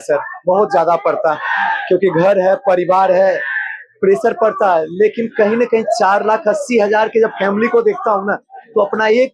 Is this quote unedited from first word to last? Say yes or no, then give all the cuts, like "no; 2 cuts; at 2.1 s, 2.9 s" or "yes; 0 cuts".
yes; 0 cuts